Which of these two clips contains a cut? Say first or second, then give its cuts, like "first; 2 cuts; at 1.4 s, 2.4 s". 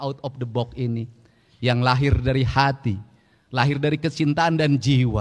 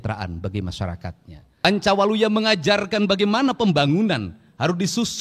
second; 1 cut; at 1.6 s